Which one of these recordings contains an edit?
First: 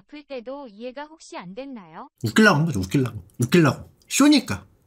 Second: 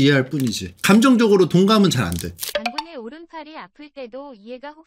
second; 1 cut; at 2.3 s

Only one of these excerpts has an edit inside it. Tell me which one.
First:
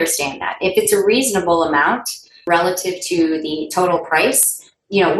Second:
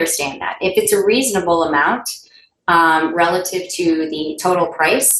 first; 1 cut; at 2.4 s

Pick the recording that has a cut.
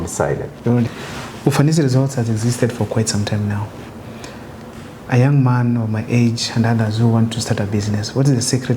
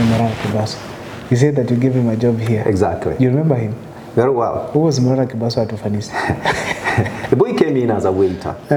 first; 1 cut; at 0.9 s

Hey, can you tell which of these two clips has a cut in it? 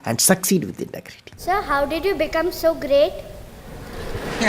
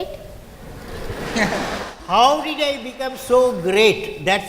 first; 1 cut; at 1.4 s

